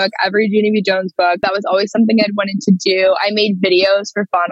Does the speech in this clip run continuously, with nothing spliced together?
no; 1 cut; at 1.4 s

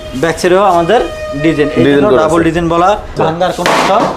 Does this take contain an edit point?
yes; 1 cut; at 3.2 s

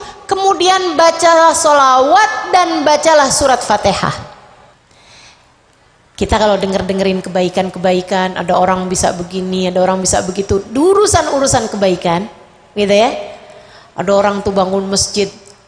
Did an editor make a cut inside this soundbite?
yes; 1 cut; at 4.7 s

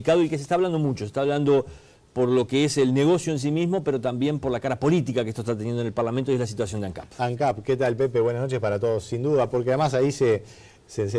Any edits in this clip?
no; 0 cuts

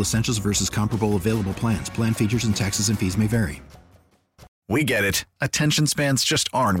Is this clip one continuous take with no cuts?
no; 1 cut; at 4.5 s

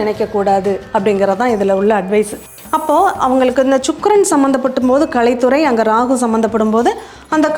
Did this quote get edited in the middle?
yes; 1 cut; at 2.4 s

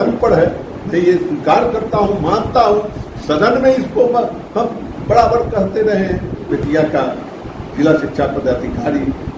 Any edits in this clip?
yes; 1 cut; at 6.6 s

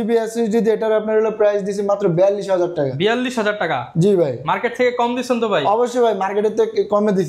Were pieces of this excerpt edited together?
no; 0 cuts

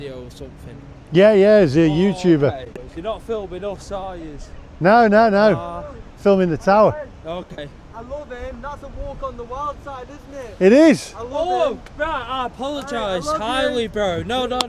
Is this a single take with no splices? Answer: no; 1 cut; at 2.8 s

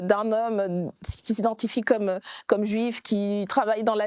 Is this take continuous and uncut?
yes; 0 cuts

